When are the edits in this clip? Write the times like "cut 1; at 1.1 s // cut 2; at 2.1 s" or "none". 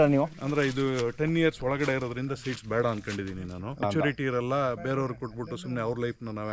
cut 1; at 3.8 s